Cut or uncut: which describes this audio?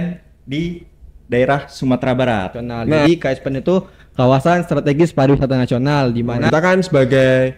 cut